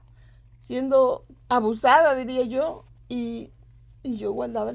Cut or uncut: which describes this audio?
uncut